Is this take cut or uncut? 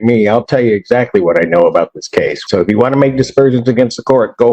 cut